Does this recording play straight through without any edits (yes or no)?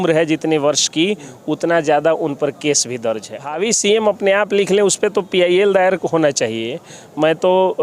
no